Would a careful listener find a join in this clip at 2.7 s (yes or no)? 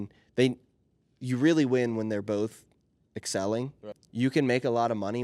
no